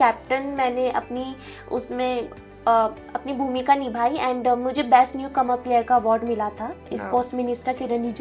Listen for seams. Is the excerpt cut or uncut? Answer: uncut